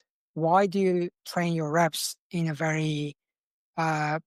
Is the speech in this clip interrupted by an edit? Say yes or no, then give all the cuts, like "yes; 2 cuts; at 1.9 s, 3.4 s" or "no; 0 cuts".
no; 0 cuts